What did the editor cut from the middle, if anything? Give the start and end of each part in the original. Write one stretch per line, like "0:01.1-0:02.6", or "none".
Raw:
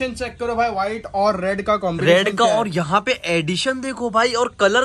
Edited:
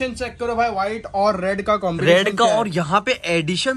none